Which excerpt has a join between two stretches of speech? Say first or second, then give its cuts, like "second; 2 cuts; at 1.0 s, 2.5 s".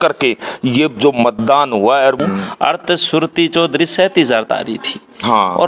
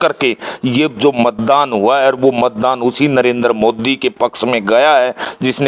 first; 1 cut; at 2.2 s